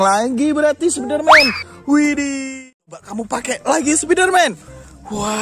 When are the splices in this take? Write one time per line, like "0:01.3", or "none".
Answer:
0:02.6